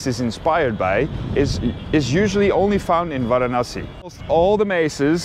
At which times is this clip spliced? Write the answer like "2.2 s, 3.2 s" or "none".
4.2 s